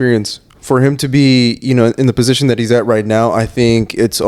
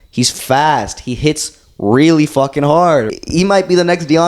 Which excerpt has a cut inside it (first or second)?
second